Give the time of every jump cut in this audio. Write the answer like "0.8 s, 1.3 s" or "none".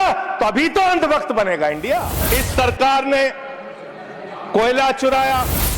2.2 s